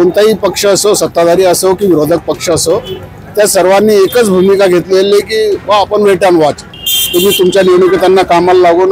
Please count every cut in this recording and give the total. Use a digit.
1